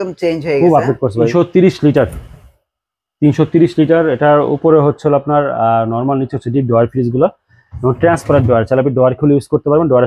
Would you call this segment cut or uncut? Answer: cut